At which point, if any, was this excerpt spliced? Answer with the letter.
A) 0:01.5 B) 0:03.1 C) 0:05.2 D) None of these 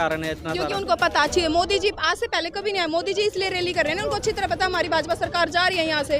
D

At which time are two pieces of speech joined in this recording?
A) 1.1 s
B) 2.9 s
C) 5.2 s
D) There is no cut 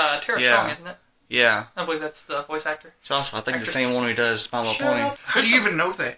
C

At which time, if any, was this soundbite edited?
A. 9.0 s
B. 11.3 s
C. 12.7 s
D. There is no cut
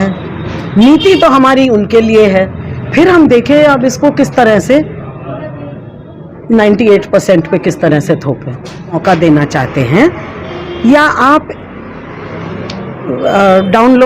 A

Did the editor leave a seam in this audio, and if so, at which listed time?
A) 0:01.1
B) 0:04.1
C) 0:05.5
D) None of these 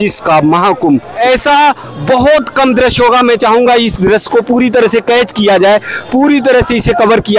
A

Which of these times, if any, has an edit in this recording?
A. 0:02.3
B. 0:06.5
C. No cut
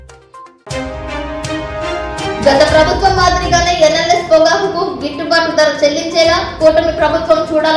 A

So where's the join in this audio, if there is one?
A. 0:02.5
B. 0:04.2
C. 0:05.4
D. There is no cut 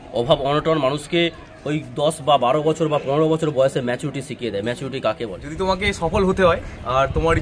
C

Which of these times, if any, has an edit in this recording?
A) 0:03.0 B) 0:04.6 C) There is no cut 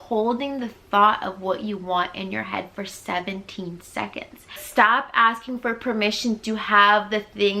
B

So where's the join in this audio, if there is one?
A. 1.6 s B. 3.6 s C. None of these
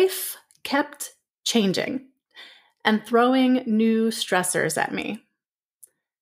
C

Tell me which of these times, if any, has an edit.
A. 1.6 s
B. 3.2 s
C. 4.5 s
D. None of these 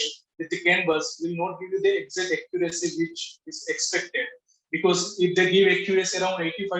D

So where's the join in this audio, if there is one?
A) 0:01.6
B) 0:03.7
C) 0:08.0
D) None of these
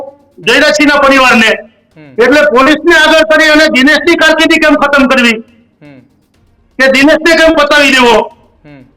D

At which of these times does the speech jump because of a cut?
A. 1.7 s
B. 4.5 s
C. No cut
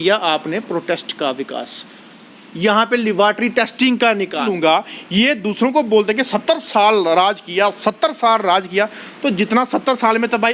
B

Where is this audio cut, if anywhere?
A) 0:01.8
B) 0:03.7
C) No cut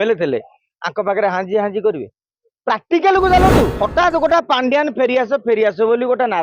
B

